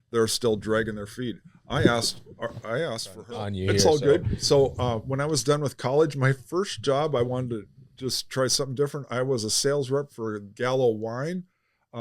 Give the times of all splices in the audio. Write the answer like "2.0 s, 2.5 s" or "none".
3.5 s